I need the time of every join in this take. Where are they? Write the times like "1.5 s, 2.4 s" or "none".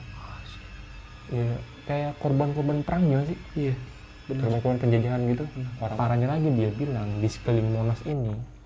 5.9 s